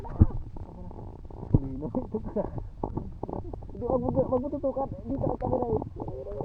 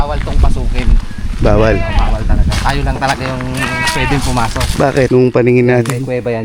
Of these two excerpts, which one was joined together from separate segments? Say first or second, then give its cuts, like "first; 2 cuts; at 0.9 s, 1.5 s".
second; 1 cut; at 5.1 s